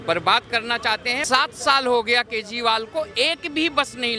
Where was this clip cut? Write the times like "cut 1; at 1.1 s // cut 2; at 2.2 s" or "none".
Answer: cut 1; at 1.1 s